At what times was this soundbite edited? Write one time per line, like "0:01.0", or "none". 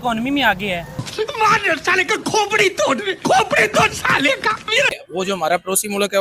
0:05.0

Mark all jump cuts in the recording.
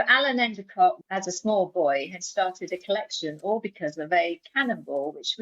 0:01.0

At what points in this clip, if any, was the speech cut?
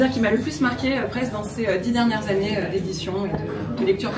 none

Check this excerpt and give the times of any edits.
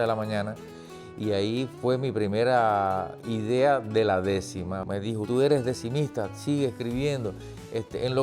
0:05.0

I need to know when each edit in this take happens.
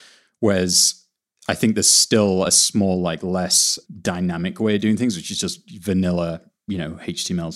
none

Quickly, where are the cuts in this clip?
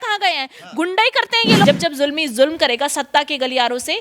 0:01.6

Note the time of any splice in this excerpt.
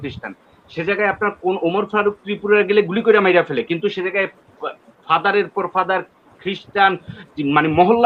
none

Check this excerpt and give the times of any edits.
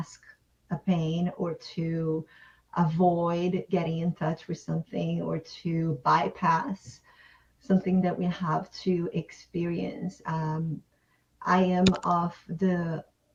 none

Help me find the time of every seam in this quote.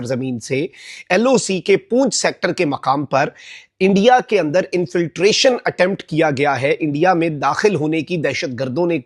none

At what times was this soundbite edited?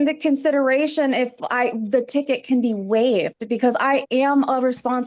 none

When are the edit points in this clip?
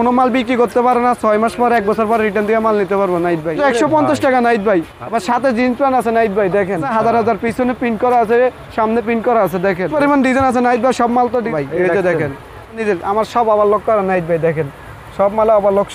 0:03.6
0:05.0
0:06.9
0:09.9
0:11.5
0:12.8

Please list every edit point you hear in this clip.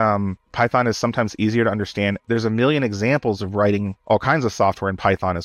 0:03.9

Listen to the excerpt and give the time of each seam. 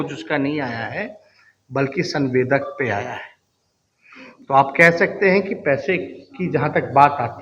none

